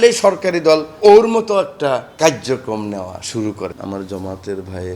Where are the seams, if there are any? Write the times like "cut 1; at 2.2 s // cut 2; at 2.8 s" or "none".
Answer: cut 1; at 0.9 s // cut 2; at 2.1 s // cut 3; at 3.7 s